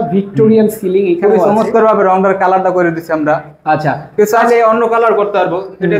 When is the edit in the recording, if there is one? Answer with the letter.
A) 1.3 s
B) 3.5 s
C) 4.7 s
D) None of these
D